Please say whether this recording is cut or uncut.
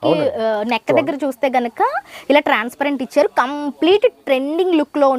uncut